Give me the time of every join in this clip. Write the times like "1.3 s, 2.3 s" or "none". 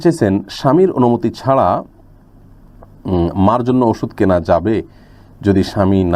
none